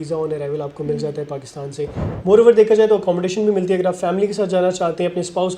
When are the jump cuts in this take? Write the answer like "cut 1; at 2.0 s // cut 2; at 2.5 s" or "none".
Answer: cut 1; at 2.0 s